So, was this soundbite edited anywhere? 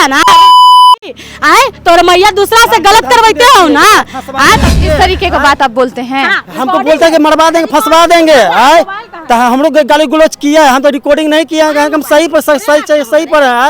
yes; 1 cut; at 4.7 s

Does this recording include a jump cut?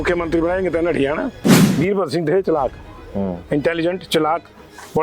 yes; 1 cut; at 1.6 s

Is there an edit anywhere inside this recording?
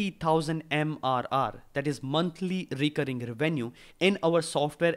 no; 0 cuts

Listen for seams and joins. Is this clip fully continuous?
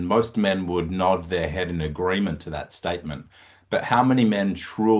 yes; 0 cuts

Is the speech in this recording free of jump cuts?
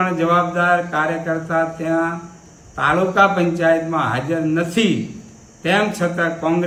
yes; 0 cuts

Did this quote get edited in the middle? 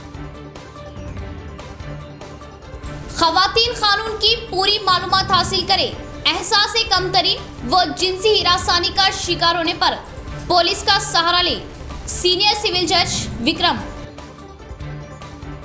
no; 0 cuts

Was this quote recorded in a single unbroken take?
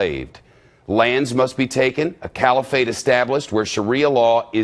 no; 1 cut; at 1.7 s

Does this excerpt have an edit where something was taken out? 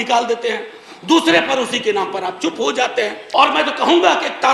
yes; 1 cut; at 3.2 s

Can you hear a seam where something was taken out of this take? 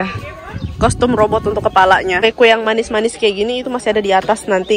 yes; 1 cut; at 2.2 s

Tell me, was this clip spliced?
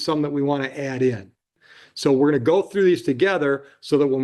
yes; 1 cut; at 1.6 s

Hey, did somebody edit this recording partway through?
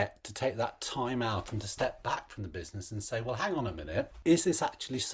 yes; 1 cut; at 4.1 s

